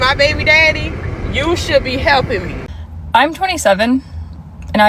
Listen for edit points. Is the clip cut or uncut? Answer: cut